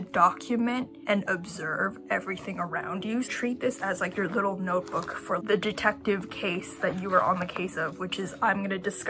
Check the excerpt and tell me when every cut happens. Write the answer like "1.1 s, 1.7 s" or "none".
1.0 s, 3.3 s, 5.4 s